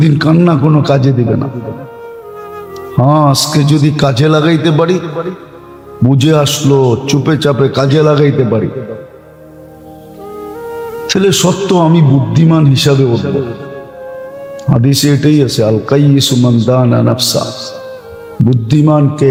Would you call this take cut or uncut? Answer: uncut